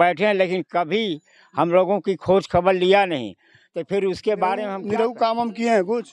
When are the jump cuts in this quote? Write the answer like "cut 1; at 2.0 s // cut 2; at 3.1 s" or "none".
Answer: cut 1; at 4.8 s

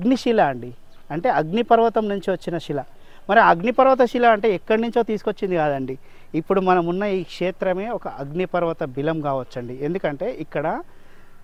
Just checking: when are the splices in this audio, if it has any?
none

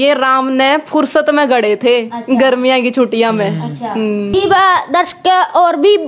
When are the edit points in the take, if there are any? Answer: cut 1; at 4.3 s

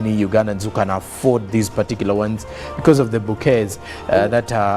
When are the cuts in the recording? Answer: cut 1; at 1.0 s

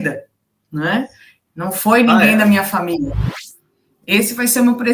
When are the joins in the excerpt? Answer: cut 1; at 3.4 s

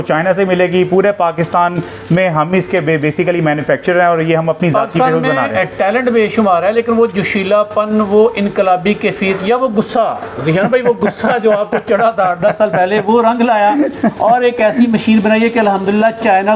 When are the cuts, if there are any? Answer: none

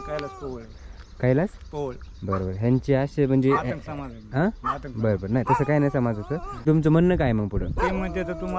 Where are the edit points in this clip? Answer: cut 1; at 6.6 s

